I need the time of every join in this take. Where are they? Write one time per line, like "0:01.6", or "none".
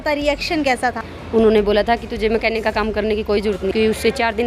0:01.1
0:03.7